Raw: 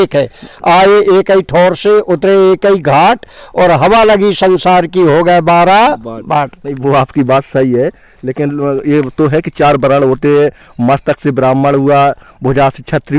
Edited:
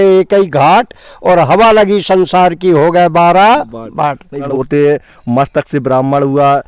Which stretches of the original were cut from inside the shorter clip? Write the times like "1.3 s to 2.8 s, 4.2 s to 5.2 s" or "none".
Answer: 6.8 s to 10.0 s